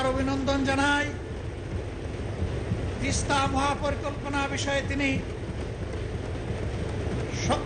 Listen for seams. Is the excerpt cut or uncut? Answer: uncut